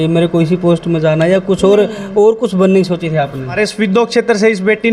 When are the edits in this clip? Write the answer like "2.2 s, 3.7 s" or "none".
3.6 s

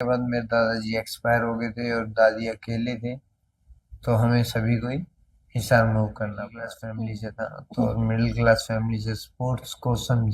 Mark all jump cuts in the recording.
6.8 s

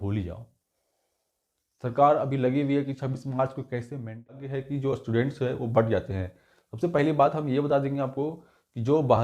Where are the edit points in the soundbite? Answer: 4.4 s

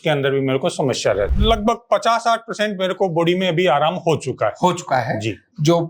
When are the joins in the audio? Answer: 1.3 s

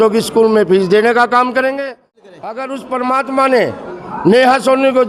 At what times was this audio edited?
2.2 s

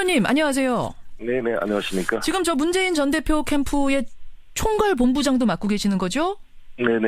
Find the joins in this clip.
2.7 s

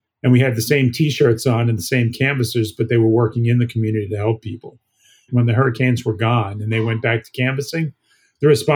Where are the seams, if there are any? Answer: 5.3 s

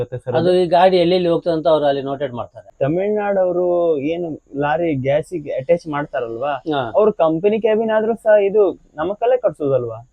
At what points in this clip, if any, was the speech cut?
2.7 s

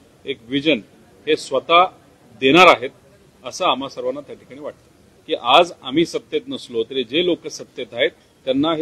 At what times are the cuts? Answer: 5.1 s

